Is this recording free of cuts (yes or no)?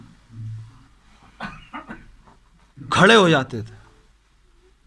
yes